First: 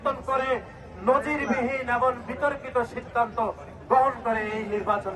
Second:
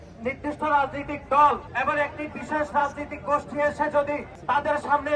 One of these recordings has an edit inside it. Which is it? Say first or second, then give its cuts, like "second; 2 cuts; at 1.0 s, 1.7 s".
second; 2 cuts; at 1.7 s, 4.3 s